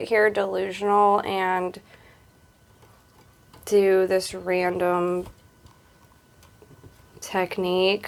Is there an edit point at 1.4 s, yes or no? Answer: no